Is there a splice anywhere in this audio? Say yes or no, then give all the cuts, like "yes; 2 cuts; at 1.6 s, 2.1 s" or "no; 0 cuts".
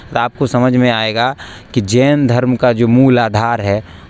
no; 0 cuts